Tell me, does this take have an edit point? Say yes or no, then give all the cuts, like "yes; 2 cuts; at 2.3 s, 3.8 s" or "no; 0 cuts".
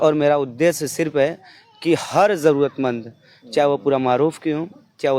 no; 0 cuts